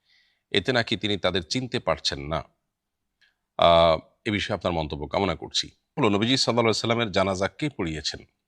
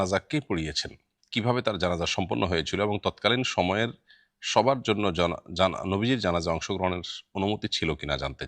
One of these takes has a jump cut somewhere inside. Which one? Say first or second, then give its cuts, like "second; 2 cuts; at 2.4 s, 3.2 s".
first; 1 cut; at 5.8 s